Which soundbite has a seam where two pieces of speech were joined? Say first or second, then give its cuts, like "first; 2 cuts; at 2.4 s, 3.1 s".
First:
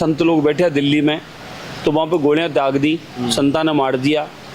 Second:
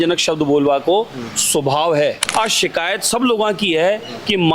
second; 1 cut; at 2.2 s